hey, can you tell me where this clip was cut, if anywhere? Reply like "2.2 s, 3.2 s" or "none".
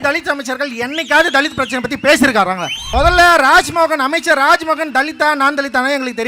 2.7 s